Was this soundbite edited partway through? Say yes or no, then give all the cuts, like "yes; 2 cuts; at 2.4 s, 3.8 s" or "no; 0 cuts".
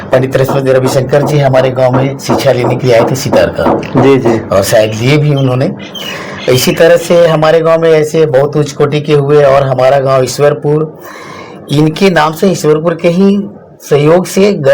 no; 0 cuts